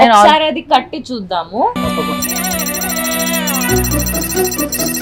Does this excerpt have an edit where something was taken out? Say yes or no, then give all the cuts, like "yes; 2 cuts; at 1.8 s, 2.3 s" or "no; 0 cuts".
no; 0 cuts